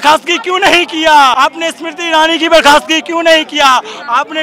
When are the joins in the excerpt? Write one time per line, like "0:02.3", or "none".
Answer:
0:01.3